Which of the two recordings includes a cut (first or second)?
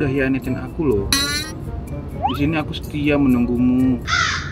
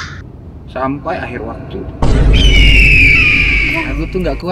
second